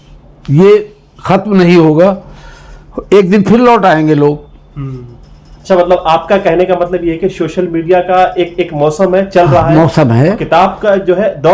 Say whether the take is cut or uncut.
uncut